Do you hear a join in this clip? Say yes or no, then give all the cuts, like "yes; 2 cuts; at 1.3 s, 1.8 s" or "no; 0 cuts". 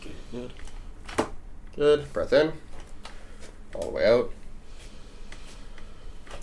no; 0 cuts